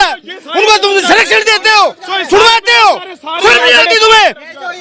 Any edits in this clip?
no; 0 cuts

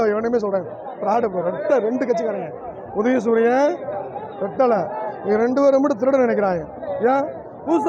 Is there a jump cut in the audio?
no; 0 cuts

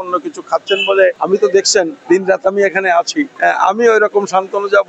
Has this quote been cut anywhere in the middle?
yes; 3 cuts; at 1.2 s, 2.0 s, 3.3 s

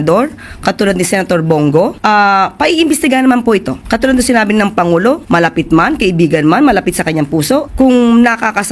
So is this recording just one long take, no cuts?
no; 4 cuts; at 2.0 s, 3.8 s, 5.2 s, 7.7 s

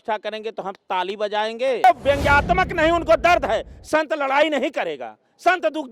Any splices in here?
yes; 1 cut; at 1.8 s

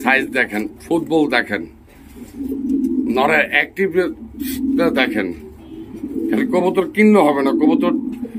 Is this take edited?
no; 0 cuts

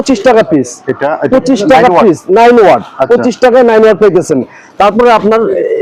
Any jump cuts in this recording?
no; 0 cuts

